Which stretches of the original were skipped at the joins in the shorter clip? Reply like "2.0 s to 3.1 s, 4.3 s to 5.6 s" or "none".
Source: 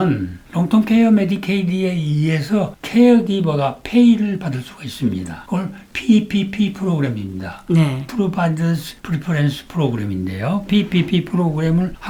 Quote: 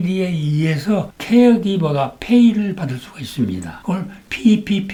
none